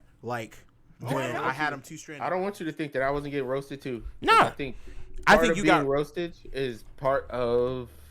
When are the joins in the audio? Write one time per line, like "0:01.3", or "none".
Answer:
0:01.9